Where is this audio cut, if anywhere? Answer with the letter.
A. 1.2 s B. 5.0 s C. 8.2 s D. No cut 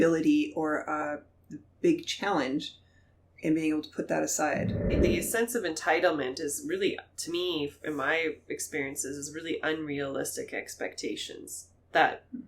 B